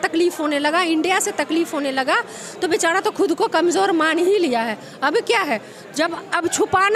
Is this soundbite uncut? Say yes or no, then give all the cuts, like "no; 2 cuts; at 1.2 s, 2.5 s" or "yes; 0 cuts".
yes; 0 cuts